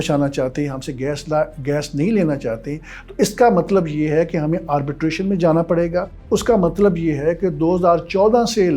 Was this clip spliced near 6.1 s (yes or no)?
yes